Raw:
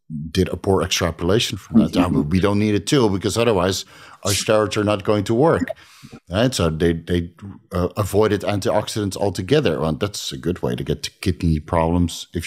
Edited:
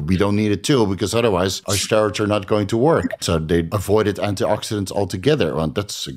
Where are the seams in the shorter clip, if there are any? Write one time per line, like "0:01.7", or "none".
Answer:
0:01.7
0:03.7